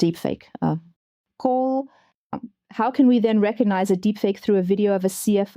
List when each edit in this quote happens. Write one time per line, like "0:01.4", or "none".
0:02.4